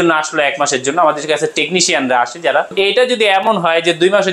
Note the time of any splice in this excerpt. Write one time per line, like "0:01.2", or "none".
0:02.7